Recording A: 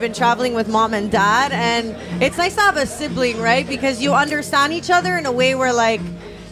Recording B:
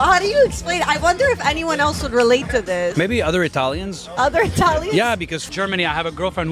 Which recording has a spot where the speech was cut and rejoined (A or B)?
B